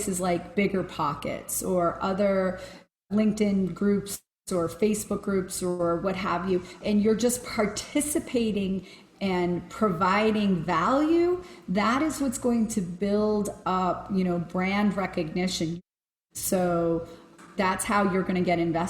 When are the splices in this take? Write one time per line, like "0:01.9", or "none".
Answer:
0:02.7
0:06.8
0:15.7
0:17.5

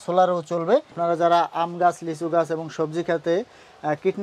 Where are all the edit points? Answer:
0:00.9

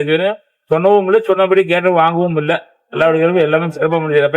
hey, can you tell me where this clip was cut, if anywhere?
none

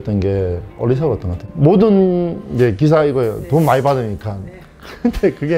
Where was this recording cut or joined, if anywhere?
0:01.3

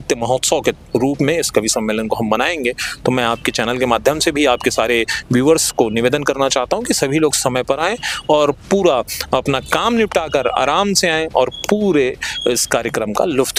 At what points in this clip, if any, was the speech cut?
none

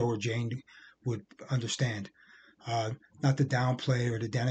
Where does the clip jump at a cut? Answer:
none

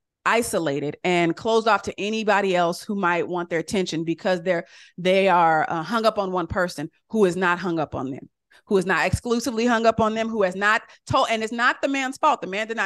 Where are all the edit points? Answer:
none

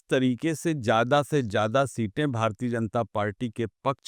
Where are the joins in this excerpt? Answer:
none

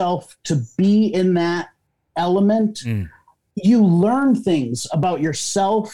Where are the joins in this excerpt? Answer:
none

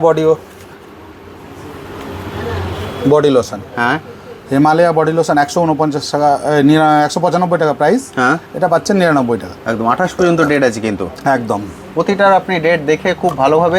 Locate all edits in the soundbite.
none

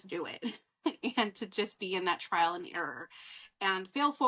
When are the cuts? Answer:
none

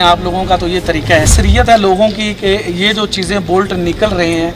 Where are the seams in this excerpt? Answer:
0:01.3

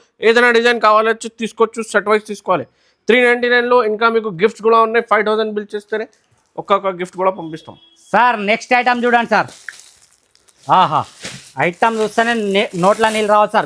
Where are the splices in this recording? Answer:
none

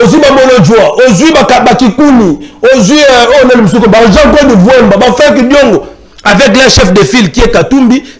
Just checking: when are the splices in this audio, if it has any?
none

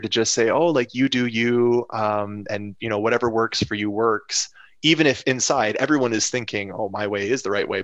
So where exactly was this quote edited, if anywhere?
none

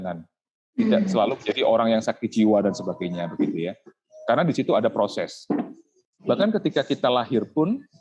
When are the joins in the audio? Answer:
0:05.9

